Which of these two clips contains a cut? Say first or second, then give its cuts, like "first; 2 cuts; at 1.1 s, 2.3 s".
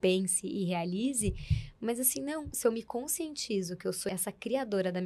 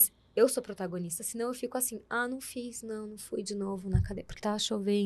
first; 2 cuts; at 2.5 s, 4.1 s